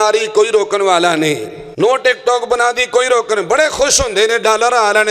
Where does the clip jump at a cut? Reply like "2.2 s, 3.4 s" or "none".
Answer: 1.6 s

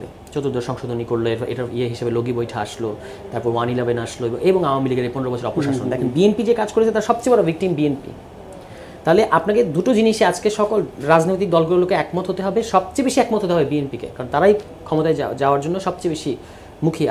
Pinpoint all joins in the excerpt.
none

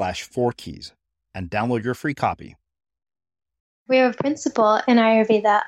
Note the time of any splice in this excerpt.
3.9 s

